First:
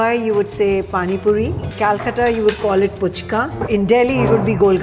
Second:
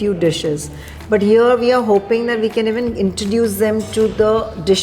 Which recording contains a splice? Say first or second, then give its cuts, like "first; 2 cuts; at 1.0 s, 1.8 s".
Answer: first; 2 cuts; at 1.7 s, 3.7 s